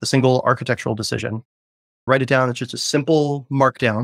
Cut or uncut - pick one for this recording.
cut